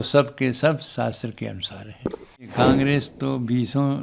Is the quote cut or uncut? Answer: cut